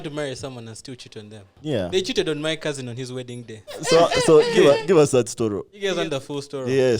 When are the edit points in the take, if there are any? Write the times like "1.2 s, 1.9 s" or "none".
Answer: 1.5 s, 3.8 s, 5.7 s